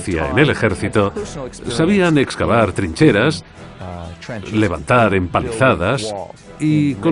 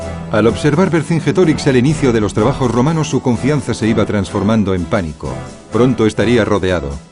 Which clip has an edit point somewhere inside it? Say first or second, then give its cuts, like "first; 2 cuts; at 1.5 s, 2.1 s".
second; 1 cut; at 2.6 s